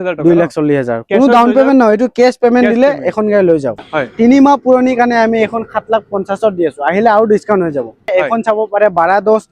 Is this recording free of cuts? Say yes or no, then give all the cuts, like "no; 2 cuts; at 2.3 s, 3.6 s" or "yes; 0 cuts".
no; 2 cuts; at 3.8 s, 8.1 s